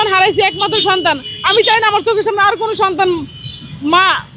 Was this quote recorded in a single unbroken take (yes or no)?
yes